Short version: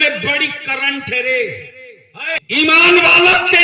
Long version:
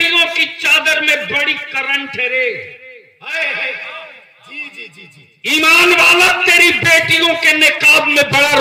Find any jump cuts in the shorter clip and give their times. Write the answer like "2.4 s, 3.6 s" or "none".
2.4 s